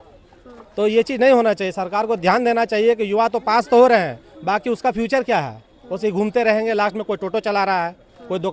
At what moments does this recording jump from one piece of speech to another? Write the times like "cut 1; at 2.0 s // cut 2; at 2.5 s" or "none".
none